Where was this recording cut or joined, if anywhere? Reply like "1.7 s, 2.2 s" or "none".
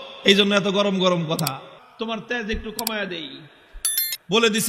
1.8 s